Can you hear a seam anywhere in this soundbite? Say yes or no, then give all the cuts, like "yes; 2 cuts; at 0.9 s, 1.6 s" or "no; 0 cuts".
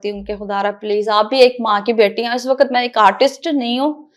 no; 0 cuts